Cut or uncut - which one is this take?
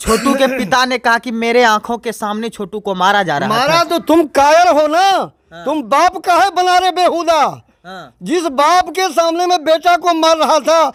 uncut